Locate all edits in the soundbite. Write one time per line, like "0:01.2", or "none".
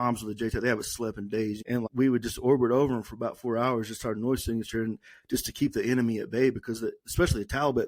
0:01.9